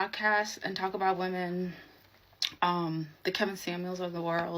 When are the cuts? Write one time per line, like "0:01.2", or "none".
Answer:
none